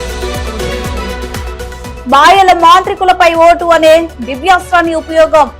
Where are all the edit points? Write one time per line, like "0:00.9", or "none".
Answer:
0:01.2